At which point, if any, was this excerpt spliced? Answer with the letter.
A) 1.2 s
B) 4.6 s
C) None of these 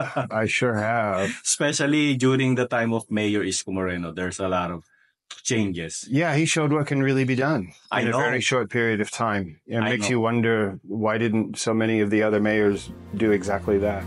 C